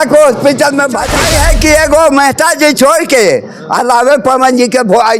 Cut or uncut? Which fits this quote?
cut